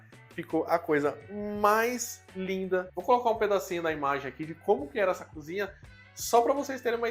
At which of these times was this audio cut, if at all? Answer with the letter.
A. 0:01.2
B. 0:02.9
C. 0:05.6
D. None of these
B